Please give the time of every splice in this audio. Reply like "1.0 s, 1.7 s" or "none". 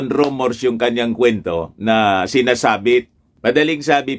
3.2 s